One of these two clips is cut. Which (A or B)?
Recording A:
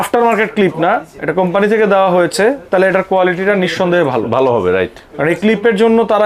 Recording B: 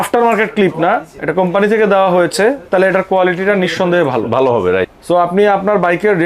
B